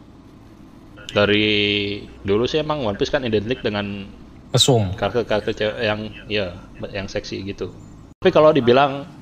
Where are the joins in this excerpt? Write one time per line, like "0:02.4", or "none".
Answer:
0:08.2